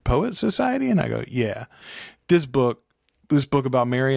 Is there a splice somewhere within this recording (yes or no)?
no